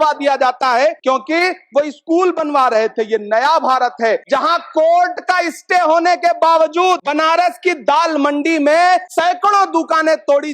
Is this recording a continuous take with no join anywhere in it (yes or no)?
no